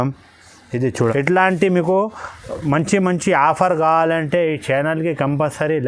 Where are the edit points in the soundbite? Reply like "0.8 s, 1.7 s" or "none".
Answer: 1.1 s